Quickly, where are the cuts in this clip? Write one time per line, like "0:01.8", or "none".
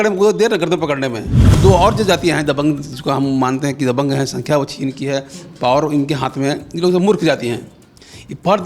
0:01.4